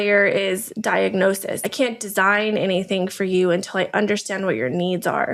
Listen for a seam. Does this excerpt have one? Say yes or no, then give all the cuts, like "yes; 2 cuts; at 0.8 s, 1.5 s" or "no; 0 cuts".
yes; 1 cut; at 1.5 s